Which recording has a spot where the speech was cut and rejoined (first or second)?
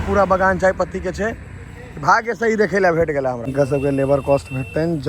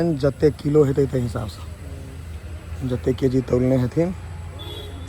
first